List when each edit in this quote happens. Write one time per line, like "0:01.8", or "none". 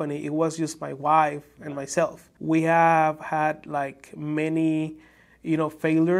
0:02.3